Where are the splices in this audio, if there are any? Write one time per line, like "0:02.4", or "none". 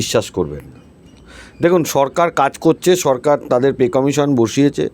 none